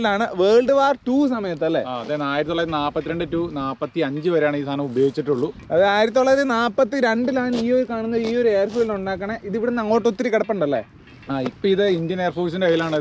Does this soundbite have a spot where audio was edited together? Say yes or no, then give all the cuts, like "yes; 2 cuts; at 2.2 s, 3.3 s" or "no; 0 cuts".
no; 0 cuts